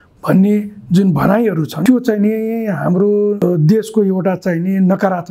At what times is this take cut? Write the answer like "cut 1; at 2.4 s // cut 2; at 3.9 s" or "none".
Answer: cut 1; at 1.7 s // cut 2; at 3.4 s